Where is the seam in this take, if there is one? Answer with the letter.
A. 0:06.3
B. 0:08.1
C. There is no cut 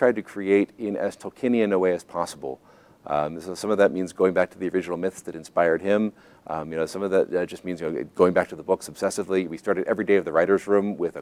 C